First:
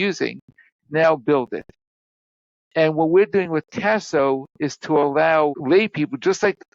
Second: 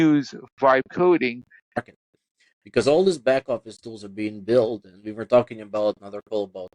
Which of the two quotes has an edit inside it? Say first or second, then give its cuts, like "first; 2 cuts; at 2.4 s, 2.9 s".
second; 1 cut; at 1.8 s